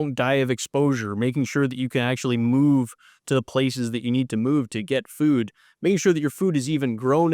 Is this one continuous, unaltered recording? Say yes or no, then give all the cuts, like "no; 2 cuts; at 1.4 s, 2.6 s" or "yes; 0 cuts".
yes; 0 cuts